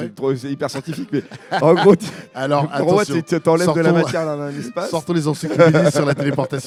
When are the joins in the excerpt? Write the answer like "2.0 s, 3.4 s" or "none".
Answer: none